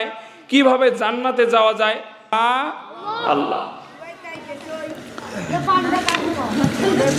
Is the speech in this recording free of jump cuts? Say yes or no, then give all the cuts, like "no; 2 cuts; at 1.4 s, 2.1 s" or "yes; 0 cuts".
no; 1 cut; at 2.3 s